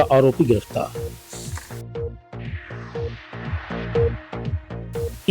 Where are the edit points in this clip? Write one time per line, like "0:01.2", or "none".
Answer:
0:00.9

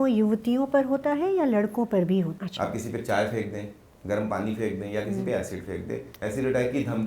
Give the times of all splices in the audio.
0:02.4
0:06.1

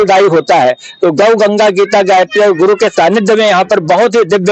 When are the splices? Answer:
none

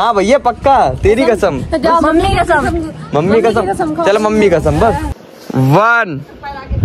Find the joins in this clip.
0:05.2

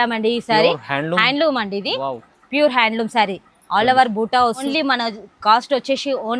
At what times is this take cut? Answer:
0:04.6

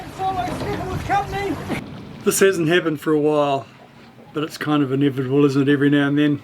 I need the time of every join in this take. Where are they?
0:01.8

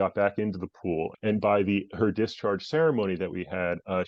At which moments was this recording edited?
0:01.1

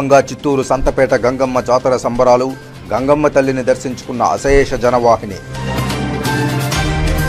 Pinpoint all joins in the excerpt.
none

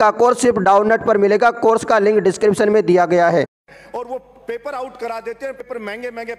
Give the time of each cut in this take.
0:03.6
0:05.6

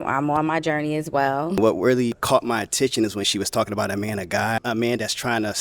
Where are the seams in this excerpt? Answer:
0:01.6
0:02.2
0:04.6

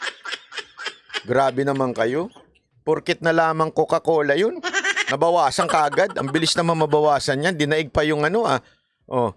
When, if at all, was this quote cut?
0:01.2

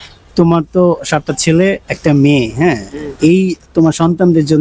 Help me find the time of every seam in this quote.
none

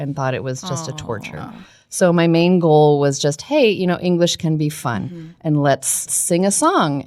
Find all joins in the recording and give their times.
0:06.2

